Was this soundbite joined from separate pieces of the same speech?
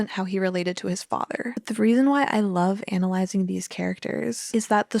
yes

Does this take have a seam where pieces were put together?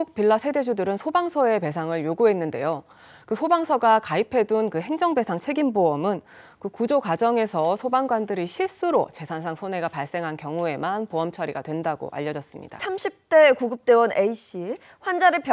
yes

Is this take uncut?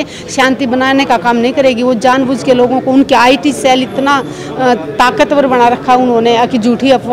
yes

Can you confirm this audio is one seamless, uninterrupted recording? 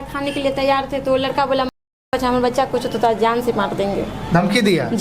yes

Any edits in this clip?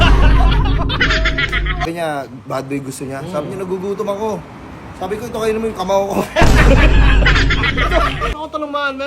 yes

